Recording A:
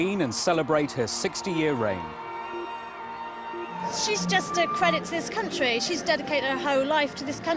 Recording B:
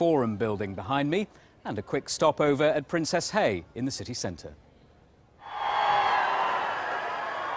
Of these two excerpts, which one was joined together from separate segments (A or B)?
B